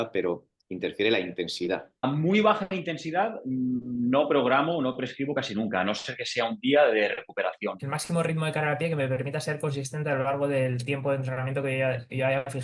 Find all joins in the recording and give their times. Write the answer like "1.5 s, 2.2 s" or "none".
2.0 s, 7.9 s